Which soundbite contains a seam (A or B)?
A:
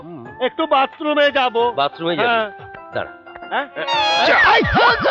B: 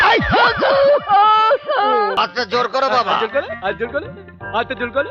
B